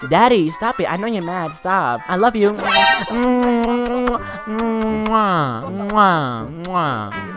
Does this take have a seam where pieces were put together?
yes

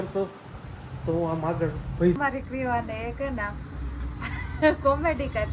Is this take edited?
yes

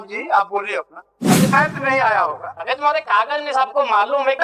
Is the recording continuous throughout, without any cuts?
no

